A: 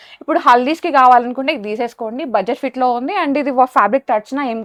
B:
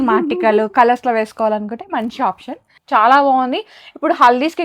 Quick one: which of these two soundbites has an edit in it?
B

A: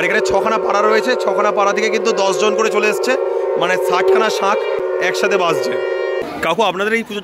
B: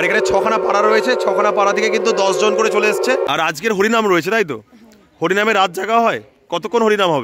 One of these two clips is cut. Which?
B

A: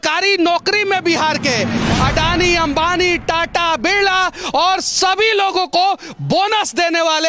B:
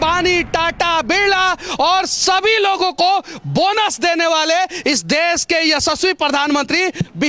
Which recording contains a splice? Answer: A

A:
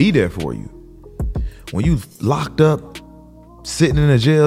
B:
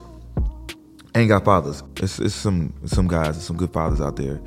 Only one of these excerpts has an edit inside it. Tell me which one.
B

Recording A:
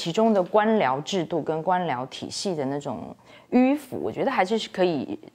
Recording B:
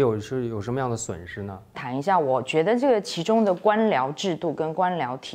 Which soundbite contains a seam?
B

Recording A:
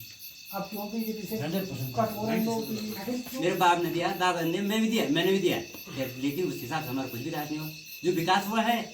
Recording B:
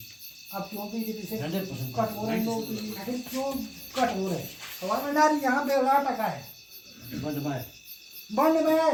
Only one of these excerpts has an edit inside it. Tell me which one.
A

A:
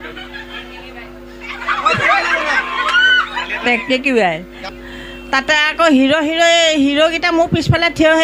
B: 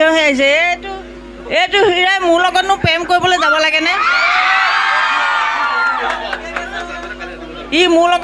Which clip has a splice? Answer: A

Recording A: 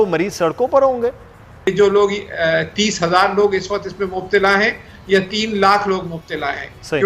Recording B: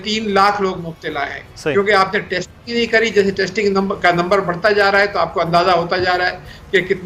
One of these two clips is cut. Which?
A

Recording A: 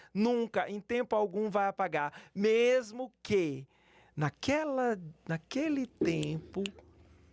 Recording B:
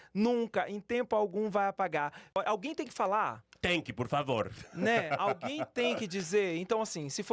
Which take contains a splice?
B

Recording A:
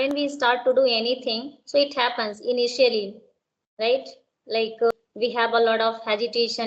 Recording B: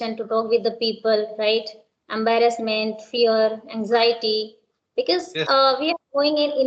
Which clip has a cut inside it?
A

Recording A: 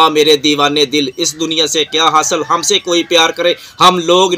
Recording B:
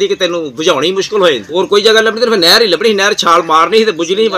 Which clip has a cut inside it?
B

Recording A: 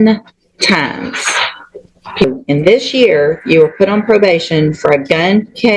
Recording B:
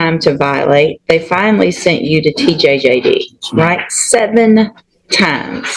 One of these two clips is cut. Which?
A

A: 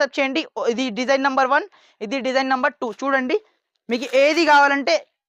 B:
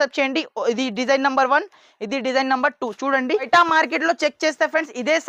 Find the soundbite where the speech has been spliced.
B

